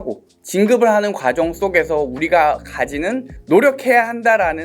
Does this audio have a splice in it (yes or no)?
yes